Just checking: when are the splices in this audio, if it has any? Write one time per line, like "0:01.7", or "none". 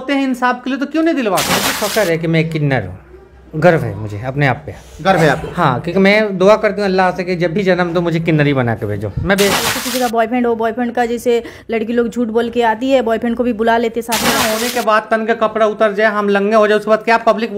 0:01.7
0:09.7
0:14.4